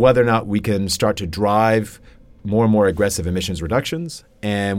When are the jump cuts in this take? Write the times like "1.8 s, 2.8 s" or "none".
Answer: none